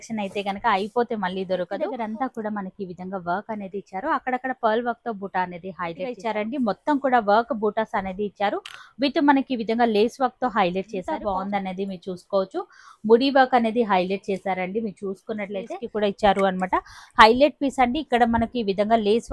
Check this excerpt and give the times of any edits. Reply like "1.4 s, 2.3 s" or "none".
1.9 s, 6.2 s, 11.1 s, 15.8 s